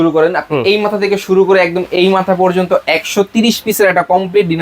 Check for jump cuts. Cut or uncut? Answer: uncut